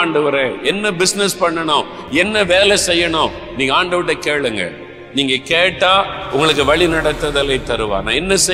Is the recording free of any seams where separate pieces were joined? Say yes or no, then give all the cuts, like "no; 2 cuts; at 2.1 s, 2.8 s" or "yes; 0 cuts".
yes; 0 cuts